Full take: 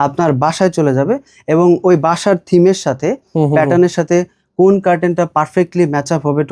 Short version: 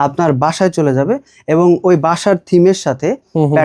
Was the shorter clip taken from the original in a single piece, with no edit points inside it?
yes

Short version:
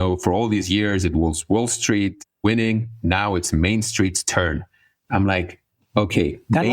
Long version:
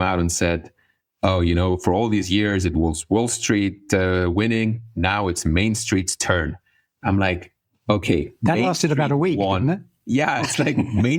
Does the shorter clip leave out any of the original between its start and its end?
yes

